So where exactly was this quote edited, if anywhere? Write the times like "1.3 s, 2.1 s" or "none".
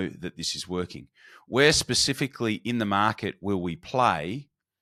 none